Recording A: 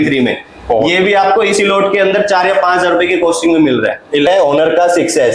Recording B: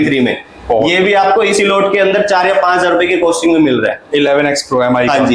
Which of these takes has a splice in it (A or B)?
A